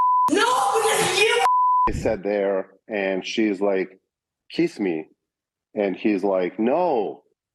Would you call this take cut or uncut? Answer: cut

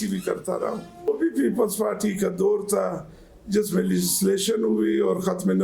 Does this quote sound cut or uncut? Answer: cut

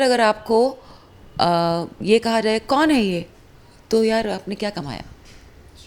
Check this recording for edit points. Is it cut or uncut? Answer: uncut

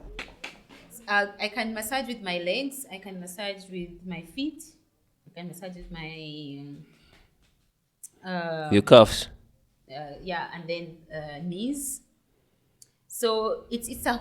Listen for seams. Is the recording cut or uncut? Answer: cut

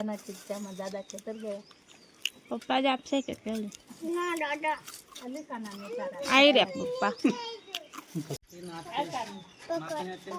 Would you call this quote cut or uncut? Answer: cut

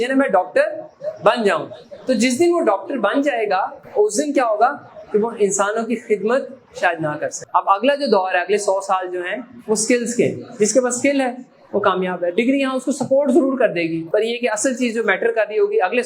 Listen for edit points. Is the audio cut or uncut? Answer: cut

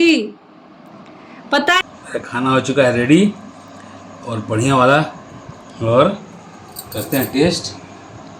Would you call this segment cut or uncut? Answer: cut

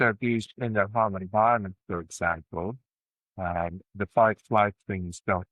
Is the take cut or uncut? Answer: uncut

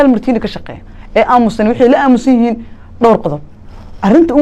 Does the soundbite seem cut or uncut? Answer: uncut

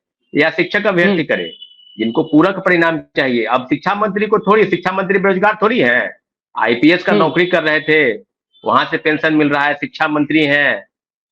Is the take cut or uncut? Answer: uncut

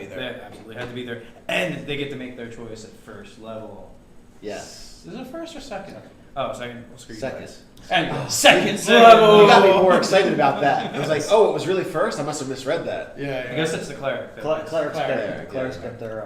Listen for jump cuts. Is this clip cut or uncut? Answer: cut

